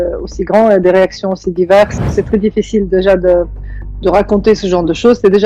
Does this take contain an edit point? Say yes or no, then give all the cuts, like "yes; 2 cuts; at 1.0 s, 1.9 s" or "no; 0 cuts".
yes; 1 cut; at 2.0 s